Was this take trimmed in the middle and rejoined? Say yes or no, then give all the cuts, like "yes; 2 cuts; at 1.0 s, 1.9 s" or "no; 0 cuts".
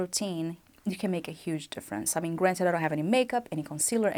no; 0 cuts